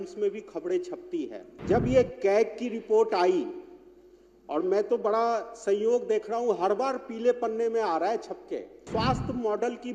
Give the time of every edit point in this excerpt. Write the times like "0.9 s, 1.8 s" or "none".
1.5 s, 8.8 s